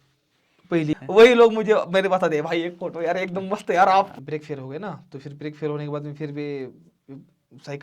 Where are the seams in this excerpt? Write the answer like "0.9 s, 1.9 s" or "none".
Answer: 1.0 s, 4.1 s

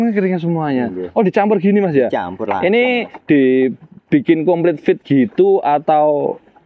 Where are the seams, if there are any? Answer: none

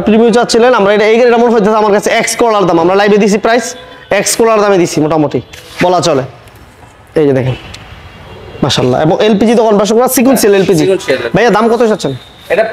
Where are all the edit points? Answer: none

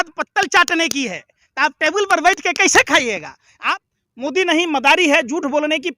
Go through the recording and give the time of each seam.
3.7 s

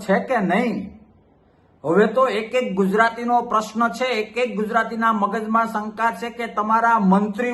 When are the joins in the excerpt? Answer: none

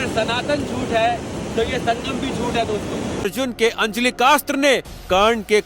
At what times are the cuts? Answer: 3.2 s

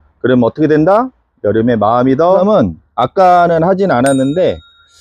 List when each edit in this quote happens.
2.4 s

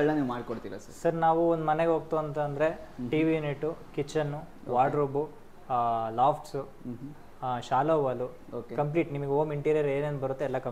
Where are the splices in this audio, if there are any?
none

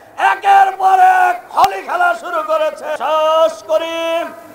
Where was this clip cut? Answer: 3.0 s

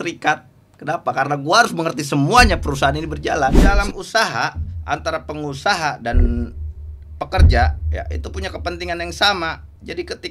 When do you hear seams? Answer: 3.7 s

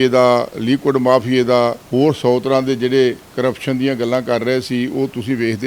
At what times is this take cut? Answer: 1.8 s, 3.3 s

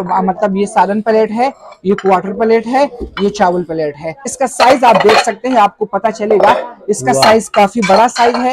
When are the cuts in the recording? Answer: 4.3 s

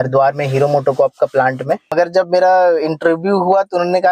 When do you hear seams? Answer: 1.9 s

